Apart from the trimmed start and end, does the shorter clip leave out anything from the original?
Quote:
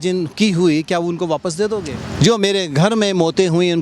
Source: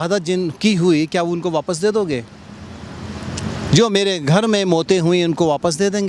yes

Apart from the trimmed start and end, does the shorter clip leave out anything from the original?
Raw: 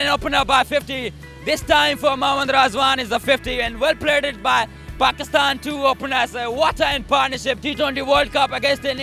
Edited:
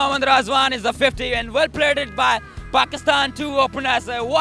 no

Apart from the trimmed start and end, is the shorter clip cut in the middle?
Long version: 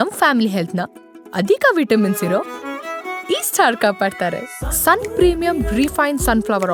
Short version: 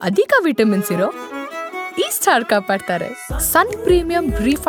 no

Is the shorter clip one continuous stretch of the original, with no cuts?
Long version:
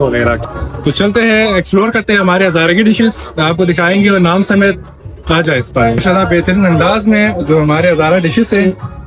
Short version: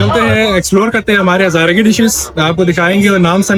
yes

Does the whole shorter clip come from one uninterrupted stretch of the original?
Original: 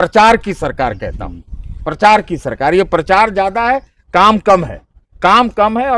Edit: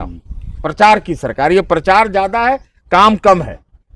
yes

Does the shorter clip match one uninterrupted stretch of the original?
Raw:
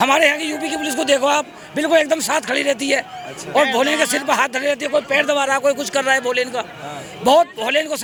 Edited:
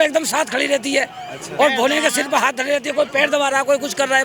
yes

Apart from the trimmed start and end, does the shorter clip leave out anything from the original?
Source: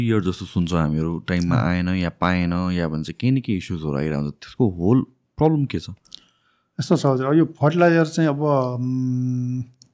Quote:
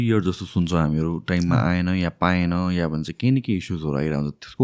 no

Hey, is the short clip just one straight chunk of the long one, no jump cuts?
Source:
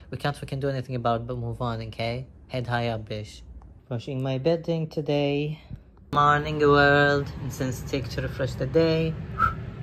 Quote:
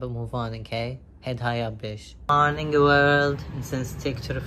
no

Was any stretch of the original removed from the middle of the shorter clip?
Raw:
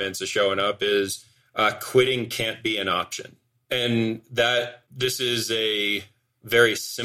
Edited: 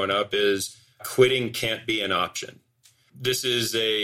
yes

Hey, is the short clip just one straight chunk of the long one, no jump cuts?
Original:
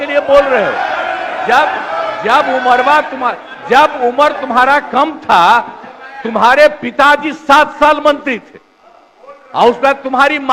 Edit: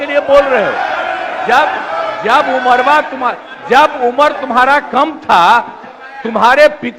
yes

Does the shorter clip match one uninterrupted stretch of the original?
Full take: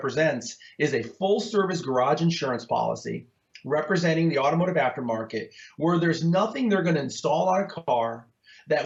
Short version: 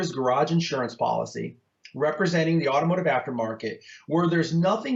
yes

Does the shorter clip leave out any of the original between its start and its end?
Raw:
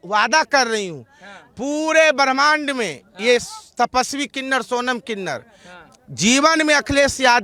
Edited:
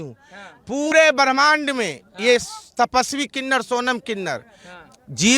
yes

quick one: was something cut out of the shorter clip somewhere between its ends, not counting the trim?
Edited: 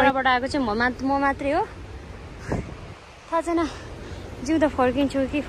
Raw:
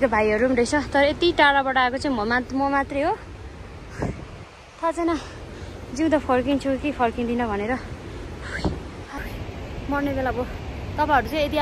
no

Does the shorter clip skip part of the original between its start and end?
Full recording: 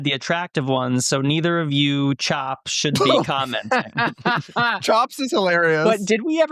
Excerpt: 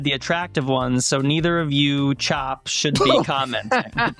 no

